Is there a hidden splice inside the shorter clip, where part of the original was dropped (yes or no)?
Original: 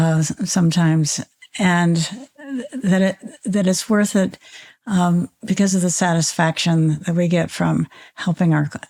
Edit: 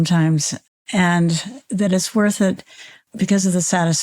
yes